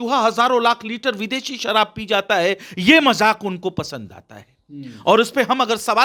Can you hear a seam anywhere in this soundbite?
no; 0 cuts

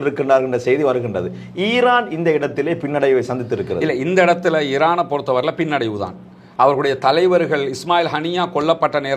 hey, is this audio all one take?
yes; 0 cuts

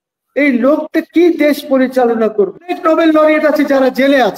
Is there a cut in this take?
yes; 1 cut; at 2.8 s

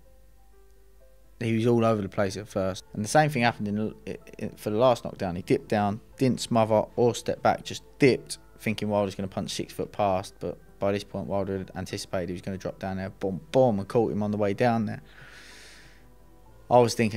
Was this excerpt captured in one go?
no; 1 cut; at 2.8 s

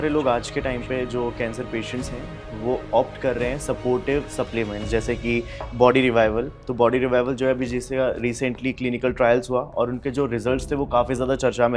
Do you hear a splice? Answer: no; 0 cuts

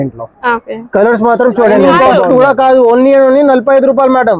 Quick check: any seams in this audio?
yes; 1 cut; at 1.9 s

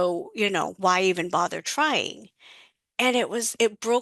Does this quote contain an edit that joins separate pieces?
no; 0 cuts

